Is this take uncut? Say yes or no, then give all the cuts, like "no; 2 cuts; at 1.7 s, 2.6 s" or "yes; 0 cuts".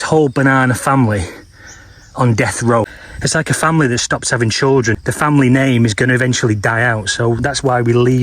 no; 2 cuts; at 3.0 s, 5.0 s